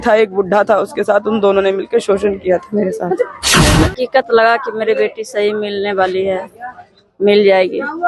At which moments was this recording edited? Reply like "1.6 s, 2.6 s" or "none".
3.7 s